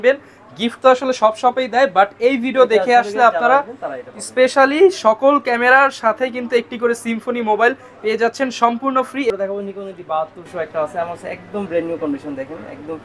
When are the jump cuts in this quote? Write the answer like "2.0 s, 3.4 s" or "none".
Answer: 9.3 s